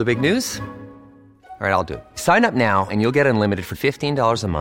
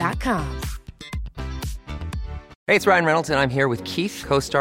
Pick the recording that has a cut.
second; 1 cut; at 2.5 s

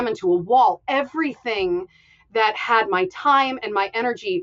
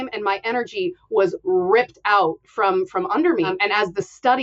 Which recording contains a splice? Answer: second; 1 cut; at 3.5 s

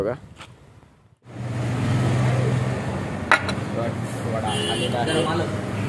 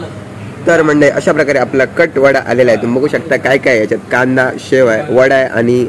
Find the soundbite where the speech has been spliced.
first; 1 cut; at 1.1 s

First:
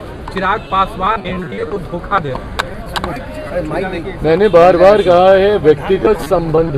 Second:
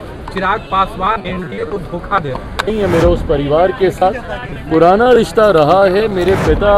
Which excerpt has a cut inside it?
second; 1 cut; at 2.7 s

